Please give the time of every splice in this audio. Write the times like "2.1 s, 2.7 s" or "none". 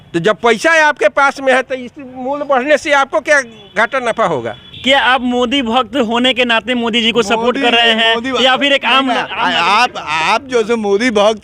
4.7 s

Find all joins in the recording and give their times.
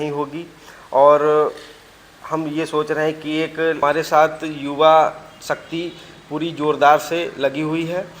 3.8 s

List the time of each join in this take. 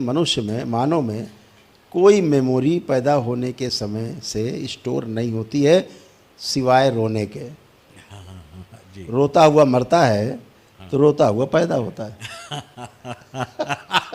none

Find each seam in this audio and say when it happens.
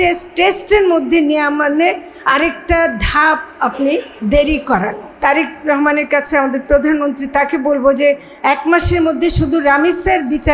5.1 s

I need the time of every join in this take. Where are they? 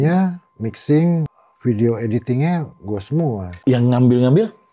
1.4 s, 3.5 s

